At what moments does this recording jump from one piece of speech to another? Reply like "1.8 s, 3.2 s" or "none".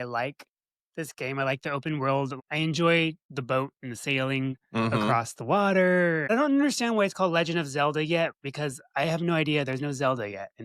2.4 s, 3.3 s, 6.3 s